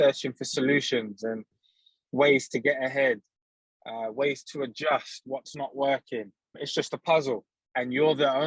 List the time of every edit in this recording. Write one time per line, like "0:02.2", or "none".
0:06.6
0:07.6